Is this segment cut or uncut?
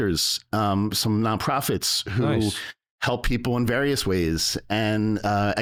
uncut